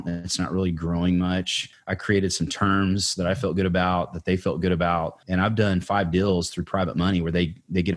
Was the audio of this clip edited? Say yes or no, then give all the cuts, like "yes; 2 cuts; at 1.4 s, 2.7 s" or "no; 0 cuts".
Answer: yes; 2 cuts; at 1.6 s, 5.2 s